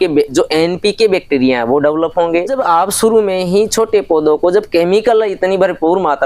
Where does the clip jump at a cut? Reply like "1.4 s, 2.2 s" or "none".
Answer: 2.5 s

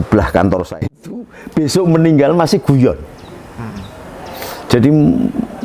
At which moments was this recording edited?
0.9 s

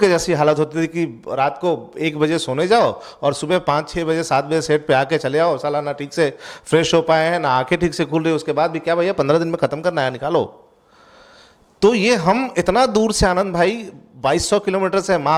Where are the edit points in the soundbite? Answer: none

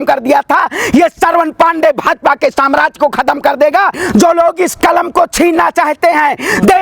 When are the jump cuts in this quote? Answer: 4.0 s

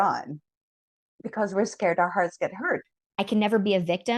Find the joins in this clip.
2.8 s

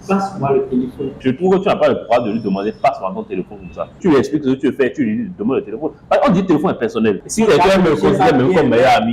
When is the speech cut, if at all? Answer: 1.2 s, 4.0 s, 7.2 s

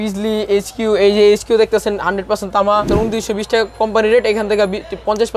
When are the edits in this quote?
2.9 s

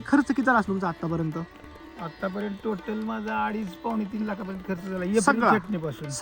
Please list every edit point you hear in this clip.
none

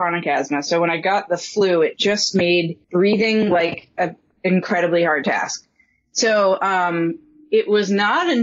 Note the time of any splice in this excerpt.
2.8 s

